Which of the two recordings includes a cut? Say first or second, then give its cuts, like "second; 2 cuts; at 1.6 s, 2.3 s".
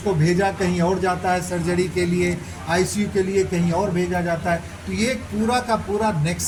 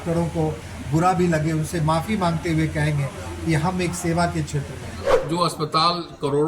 second; 1 cut; at 5.2 s